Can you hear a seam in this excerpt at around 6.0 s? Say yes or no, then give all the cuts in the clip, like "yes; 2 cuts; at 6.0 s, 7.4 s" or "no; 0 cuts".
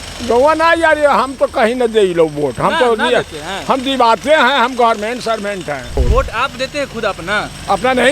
yes; 1 cut; at 6.0 s